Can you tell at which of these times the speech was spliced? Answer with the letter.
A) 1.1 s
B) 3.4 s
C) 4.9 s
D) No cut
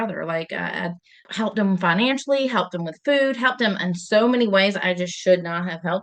A